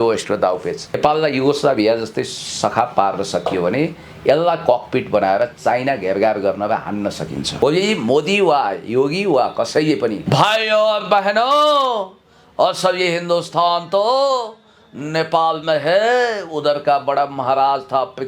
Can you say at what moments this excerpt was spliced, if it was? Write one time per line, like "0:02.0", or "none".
0:01.0
0:07.5
0:10.2